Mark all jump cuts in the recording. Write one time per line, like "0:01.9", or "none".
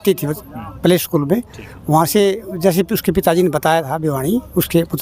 none